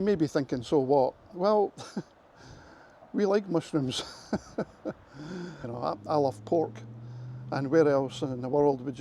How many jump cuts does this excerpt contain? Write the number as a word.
one